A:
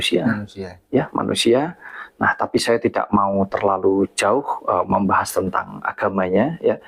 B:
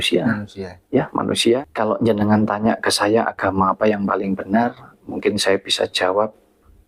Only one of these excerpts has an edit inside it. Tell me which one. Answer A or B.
B